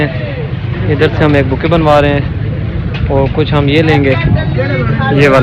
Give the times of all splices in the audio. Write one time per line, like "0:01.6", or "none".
none